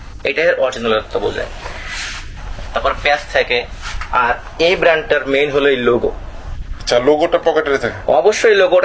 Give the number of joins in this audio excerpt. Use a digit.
0